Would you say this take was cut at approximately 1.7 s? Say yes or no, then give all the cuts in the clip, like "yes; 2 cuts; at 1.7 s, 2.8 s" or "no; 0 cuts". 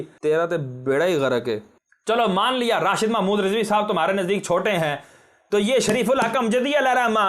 yes; 1 cut; at 1.7 s